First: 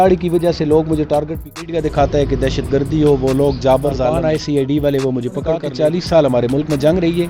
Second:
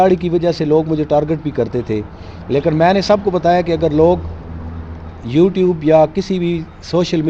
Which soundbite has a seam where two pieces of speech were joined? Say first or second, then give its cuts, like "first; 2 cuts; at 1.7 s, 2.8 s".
first; 3 cuts; at 1.6 s, 4.4 s, 5.7 s